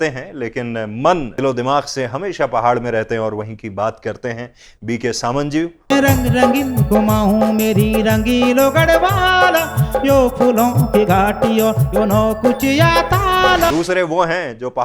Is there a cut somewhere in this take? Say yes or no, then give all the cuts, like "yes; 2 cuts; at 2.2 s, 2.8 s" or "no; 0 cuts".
yes; 3 cuts; at 1.3 s, 5.9 s, 13.7 s